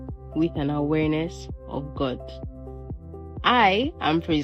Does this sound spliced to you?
no; 0 cuts

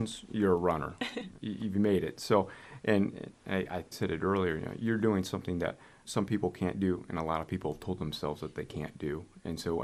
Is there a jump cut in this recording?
no; 0 cuts

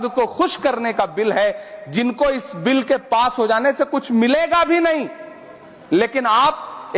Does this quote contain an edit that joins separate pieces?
no; 0 cuts

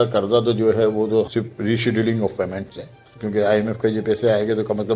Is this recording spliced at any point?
yes; 2 cuts; at 1.3 s, 3.1 s

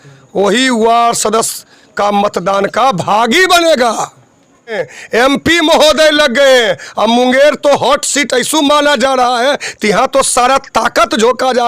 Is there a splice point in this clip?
yes; 1 cut; at 4.8 s

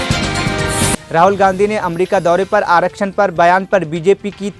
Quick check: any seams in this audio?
no; 0 cuts

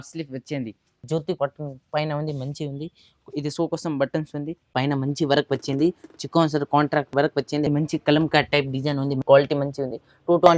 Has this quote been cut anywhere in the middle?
yes; 4 cuts; at 1.0 s, 4.7 s, 7.7 s, 9.2 s

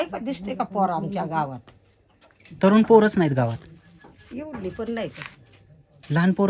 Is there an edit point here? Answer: no; 0 cuts

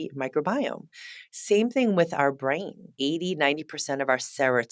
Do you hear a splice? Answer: yes; 1 cut; at 2.9 s

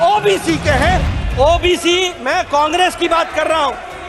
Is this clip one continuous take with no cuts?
no; 1 cut; at 1.1 s

